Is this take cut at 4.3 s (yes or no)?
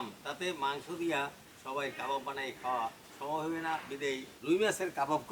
yes